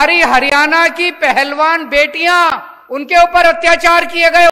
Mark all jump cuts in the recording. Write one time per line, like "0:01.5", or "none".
0:03.1